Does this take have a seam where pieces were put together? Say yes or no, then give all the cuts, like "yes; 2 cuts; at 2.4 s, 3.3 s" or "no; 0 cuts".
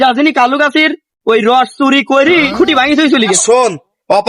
yes; 1 cut; at 3.4 s